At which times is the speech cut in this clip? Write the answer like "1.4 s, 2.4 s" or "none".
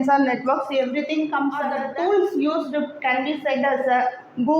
1.8 s

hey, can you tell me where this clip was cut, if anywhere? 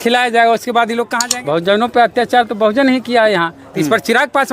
1.2 s

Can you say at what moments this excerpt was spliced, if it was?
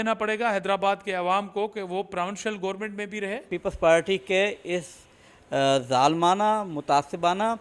3.5 s

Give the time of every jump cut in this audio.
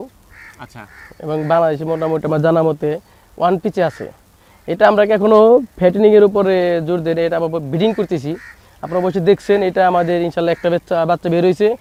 none

